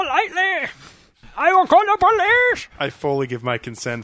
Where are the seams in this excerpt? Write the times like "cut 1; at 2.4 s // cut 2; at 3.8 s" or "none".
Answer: cut 1; at 1.3 s